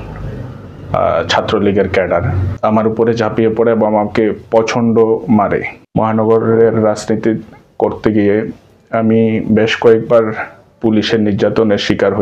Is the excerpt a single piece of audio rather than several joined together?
no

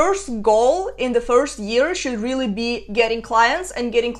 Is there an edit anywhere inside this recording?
no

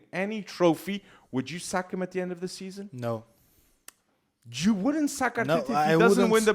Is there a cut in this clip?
no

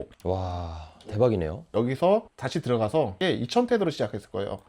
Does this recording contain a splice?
yes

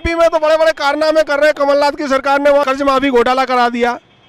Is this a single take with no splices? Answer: no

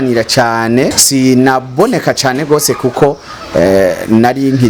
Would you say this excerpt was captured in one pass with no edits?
no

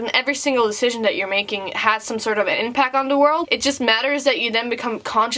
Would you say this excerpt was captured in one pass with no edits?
no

